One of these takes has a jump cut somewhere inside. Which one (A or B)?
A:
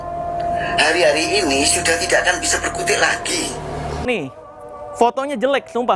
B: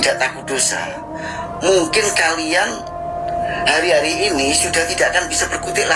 A